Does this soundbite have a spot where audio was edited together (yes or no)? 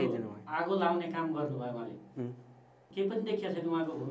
yes